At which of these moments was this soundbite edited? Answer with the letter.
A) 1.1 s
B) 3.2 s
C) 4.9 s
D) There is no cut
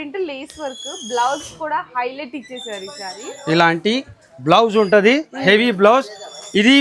D